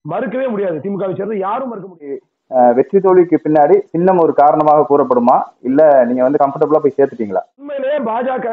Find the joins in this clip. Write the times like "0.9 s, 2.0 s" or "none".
2.3 s, 7.7 s